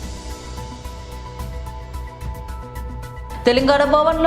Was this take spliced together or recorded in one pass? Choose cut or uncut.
cut